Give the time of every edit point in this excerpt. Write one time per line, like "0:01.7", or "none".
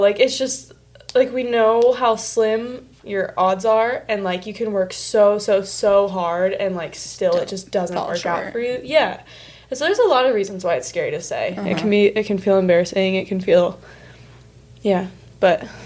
0:02.9